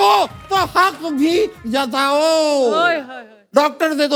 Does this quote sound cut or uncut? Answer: uncut